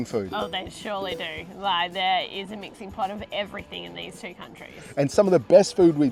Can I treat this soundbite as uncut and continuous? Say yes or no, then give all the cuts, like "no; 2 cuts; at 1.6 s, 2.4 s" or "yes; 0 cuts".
yes; 0 cuts